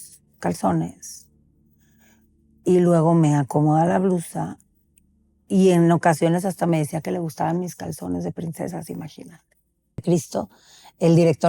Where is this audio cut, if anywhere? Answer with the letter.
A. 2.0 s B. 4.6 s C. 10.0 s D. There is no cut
C